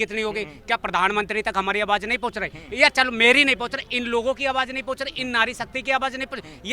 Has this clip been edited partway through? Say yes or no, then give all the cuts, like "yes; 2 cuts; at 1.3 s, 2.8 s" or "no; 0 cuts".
no; 0 cuts